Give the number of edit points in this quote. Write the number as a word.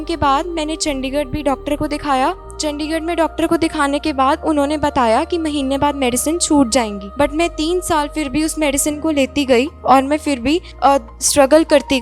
three